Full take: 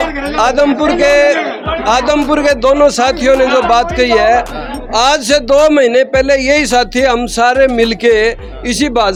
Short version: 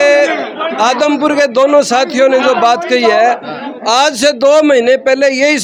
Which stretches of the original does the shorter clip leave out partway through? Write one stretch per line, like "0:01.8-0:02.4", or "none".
none